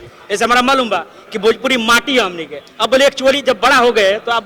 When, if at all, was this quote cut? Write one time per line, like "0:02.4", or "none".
none